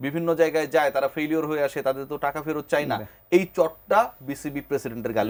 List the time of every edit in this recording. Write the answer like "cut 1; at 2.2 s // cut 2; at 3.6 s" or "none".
none